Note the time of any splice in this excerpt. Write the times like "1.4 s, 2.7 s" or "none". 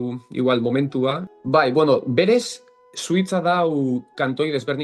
1.3 s